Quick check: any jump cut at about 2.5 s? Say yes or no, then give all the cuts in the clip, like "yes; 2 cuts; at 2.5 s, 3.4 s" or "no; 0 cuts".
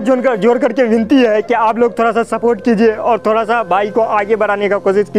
no; 0 cuts